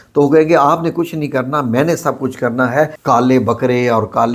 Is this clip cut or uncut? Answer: cut